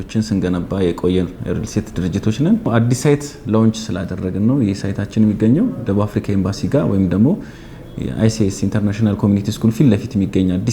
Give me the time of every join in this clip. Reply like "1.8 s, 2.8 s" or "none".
2.6 s